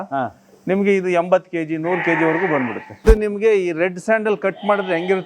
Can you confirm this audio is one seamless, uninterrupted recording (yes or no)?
no